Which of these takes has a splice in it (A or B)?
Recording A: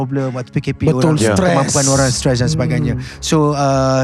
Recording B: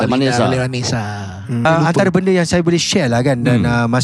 B